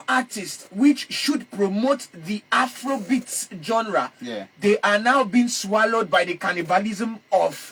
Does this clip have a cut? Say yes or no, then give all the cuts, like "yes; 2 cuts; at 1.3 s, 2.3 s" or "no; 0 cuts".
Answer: no; 0 cuts